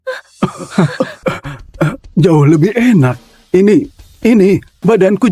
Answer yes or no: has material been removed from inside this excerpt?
yes